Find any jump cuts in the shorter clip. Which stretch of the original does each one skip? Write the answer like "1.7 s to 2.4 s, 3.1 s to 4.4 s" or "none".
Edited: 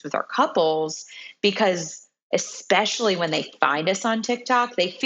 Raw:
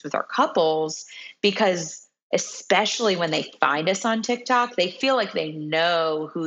none